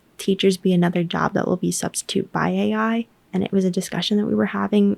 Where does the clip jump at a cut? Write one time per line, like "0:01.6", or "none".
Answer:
none